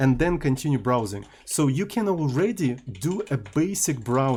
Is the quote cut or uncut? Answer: uncut